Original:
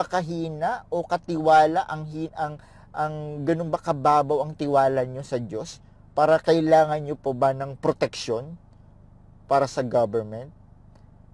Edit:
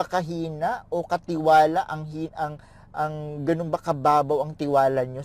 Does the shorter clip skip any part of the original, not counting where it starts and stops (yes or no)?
no